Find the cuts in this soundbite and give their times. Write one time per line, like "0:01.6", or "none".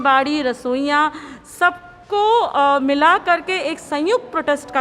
none